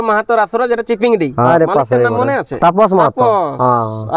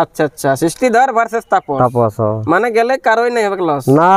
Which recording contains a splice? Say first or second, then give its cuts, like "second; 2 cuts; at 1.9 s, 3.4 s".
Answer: first; 2 cuts; at 1.5 s, 2.5 s